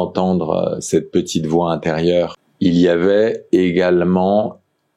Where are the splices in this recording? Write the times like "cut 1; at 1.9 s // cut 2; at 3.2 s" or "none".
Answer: cut 1; at 2.4 s